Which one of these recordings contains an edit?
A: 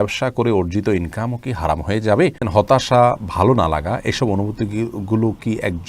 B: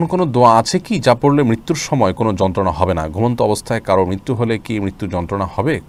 A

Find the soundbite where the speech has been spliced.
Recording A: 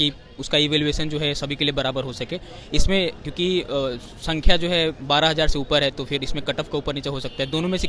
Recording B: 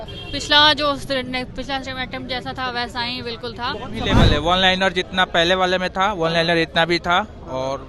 B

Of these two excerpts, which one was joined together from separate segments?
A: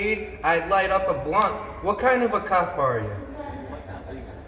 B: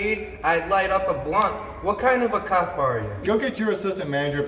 B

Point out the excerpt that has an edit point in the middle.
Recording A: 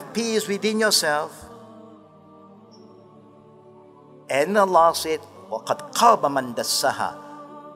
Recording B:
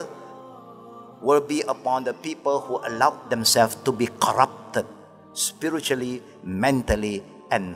A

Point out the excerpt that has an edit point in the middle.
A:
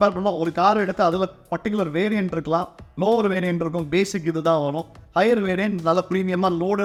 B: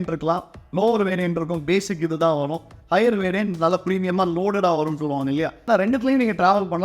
B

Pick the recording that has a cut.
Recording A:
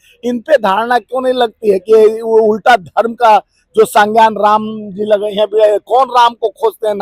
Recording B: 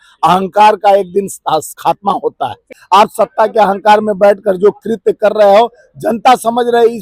B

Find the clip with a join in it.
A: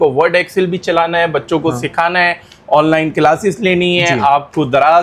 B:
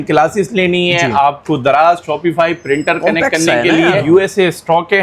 B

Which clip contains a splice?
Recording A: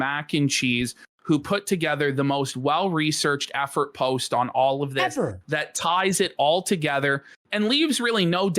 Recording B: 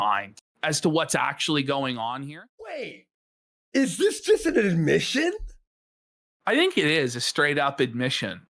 B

